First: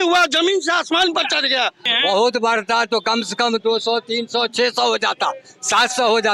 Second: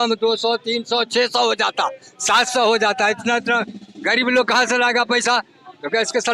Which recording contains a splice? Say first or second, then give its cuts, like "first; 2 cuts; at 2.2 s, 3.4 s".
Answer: first; 1 cut; at 1.9 s